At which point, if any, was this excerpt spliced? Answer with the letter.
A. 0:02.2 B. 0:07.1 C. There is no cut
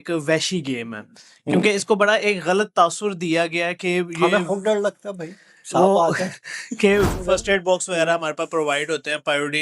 B